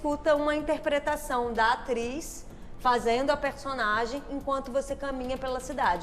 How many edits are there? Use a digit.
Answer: 0